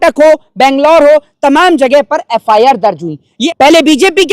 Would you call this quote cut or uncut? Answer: cut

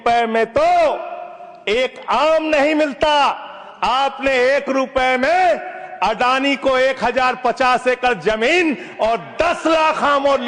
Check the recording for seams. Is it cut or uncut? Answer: uncut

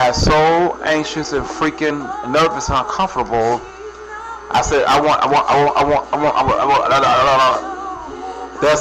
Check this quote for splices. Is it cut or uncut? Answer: uncut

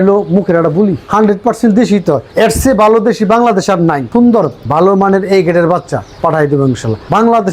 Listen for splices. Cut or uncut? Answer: cut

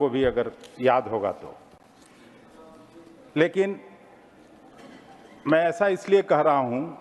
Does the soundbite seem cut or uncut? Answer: uncut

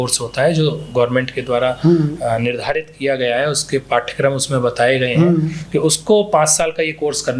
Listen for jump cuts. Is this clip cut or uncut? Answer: uncut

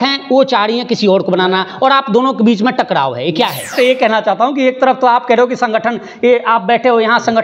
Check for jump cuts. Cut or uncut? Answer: cut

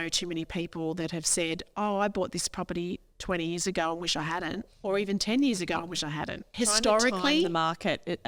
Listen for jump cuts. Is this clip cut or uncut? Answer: cut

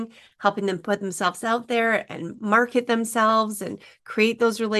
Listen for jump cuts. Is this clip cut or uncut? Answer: uncut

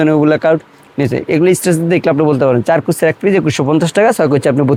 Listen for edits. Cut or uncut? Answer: uncut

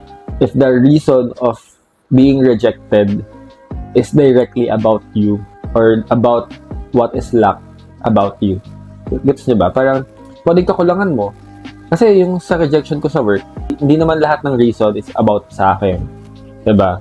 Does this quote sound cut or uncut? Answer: uncut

